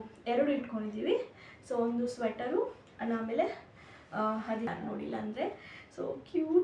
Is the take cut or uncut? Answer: cut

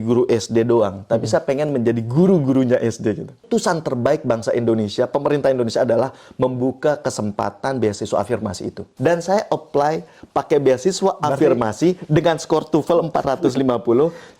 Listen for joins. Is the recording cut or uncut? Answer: cut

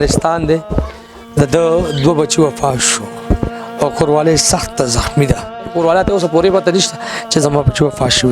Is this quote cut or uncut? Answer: cut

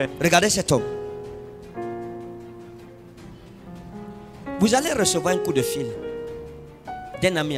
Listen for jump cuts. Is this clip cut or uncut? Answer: uncut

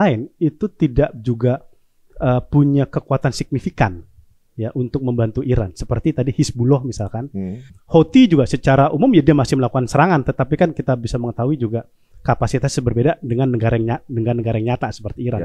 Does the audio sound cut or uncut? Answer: cut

